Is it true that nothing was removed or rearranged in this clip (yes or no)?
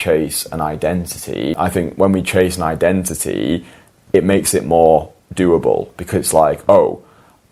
no